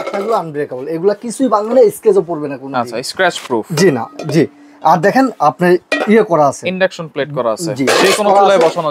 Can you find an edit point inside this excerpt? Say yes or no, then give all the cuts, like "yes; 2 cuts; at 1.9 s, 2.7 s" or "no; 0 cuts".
no; 0 cuts